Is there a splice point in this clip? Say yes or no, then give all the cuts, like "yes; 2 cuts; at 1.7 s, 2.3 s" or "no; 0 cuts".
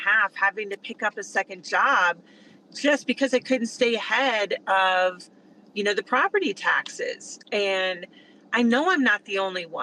no; 0 cuts